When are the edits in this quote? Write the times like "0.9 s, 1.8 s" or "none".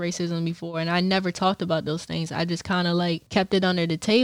3.2 s

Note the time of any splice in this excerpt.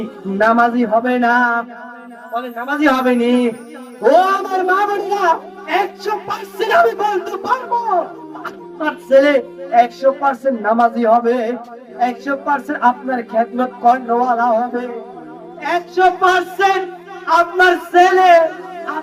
none

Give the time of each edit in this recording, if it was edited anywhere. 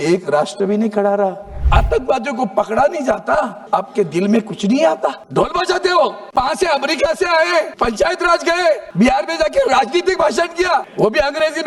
1.5 s, 3.6 s, 5.2 s, 6.2 s, 7.7 s, 8.9 s, 10.9 s

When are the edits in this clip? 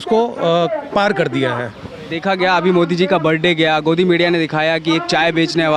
none

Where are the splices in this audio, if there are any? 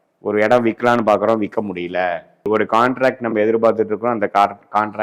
none

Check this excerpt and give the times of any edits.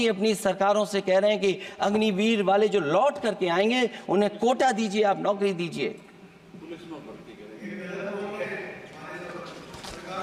none

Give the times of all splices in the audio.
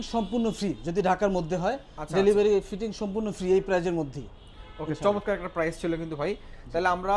none

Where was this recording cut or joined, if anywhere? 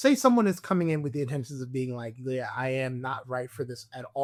none

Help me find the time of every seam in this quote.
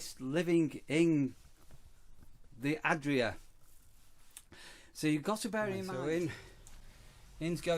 5.8 s

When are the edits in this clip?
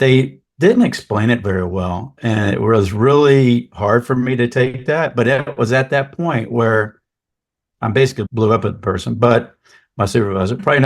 8.2 s

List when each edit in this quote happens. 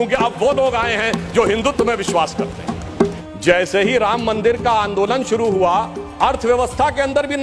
3.2 s

